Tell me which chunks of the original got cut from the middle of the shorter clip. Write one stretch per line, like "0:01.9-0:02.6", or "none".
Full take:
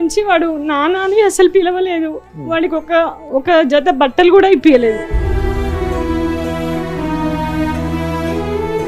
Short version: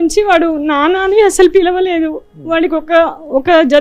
none